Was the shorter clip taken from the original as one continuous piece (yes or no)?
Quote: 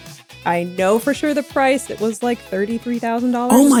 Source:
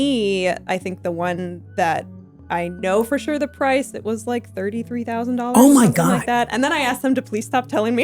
yes